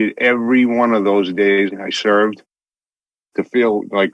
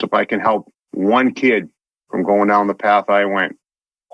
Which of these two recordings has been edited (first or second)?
first